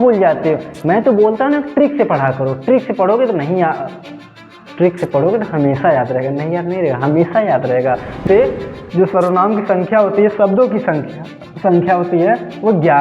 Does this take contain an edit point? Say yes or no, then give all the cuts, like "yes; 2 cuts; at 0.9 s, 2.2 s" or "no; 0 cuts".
yes; 1 cut; at 8.2 s